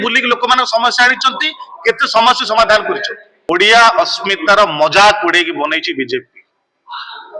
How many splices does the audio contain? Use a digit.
1